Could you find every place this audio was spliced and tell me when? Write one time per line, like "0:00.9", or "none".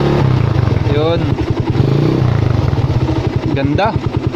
0:01.8
0:03.4